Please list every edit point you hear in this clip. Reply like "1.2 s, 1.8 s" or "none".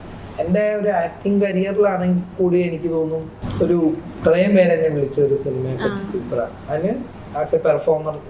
3.4 s, 4.1 s

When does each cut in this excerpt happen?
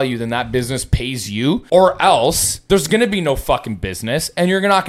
1.6 s, 2.5 s

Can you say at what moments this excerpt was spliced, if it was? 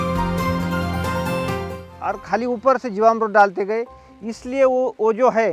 1.9 s

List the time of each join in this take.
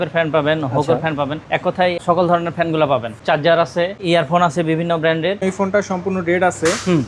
2.0 s, 3.2 s, 4.0 s, 5.4 s

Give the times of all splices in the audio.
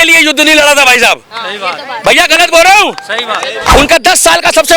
3.5 s

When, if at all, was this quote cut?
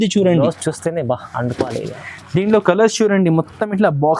none

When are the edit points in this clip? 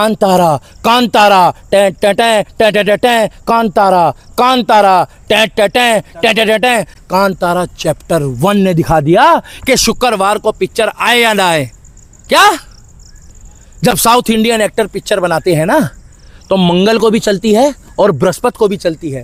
none

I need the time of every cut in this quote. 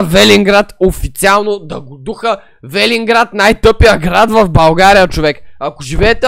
none

